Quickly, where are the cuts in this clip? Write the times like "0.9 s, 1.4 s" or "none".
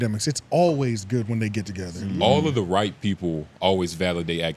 1.9 s